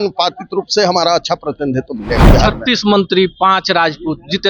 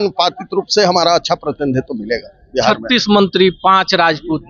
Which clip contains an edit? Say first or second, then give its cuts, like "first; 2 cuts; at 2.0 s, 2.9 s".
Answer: first; 1 cut; at 2.2 s